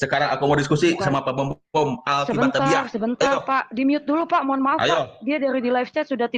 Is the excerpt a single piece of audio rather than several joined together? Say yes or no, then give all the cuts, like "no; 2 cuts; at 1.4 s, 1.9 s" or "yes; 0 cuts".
yes; 0 cuts